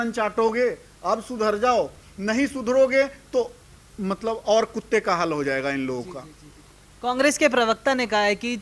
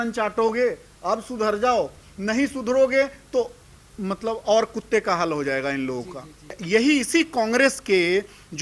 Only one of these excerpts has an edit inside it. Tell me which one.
second; 1 cut; at 6.6 s

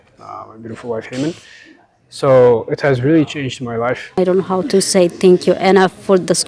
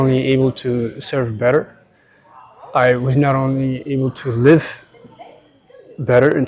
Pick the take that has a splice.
first; 1 cut; at 4.2 s

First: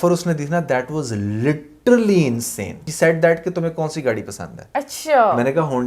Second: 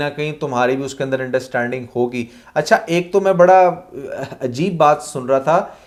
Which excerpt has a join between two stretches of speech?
first; 1 cut; at 2.8 s

